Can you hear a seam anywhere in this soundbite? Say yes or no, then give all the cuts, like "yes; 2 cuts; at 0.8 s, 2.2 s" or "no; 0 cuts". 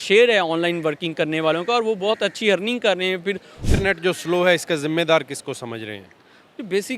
yes; 1 cut; at 3.6 s